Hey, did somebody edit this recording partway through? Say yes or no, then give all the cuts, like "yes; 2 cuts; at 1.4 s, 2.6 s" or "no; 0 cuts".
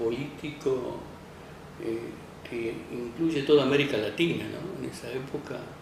no; 0 cuts